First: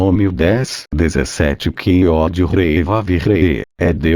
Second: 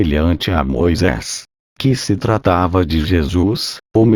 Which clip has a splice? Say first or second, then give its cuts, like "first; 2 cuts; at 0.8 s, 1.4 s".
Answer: first; 1 cut; at 1.7 s